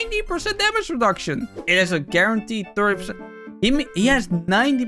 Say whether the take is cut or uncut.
cut